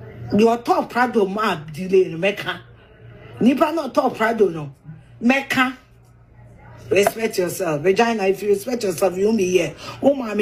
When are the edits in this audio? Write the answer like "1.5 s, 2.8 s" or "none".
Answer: none